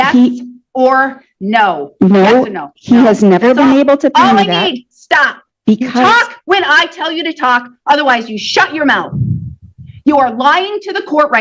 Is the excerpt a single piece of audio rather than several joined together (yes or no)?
yes